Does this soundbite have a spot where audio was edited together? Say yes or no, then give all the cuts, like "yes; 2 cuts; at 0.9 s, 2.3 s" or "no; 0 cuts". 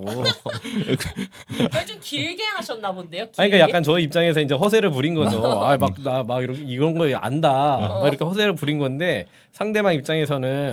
no; 0 cuts